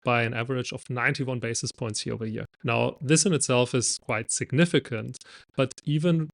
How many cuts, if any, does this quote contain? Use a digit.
2